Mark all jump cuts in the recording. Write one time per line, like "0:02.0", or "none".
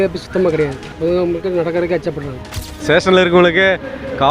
0:02.8

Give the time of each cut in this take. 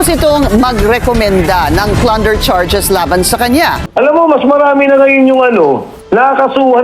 0:03.8

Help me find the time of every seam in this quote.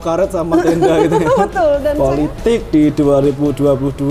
0:02.0

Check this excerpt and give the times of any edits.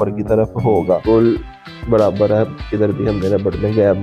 0:01.0

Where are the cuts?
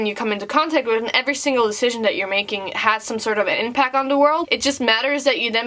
0:04.5

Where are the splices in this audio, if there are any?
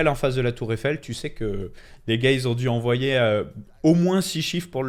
none

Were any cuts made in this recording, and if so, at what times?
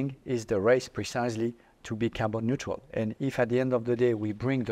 none

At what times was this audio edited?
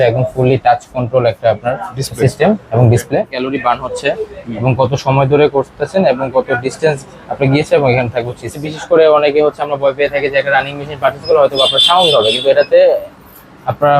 0:03.4
0:08.7

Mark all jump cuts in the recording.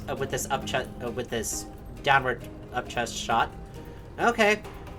none

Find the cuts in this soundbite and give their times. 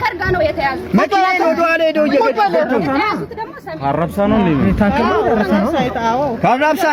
none

